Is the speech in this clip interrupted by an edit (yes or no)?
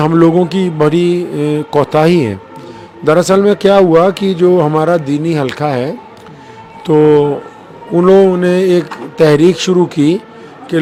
no